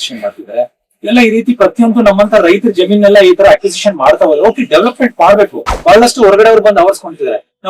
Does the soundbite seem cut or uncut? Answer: cut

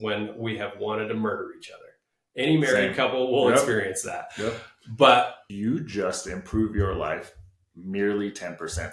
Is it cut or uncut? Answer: cut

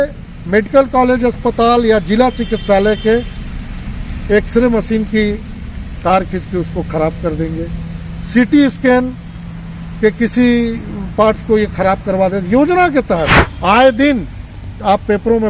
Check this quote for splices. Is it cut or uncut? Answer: cut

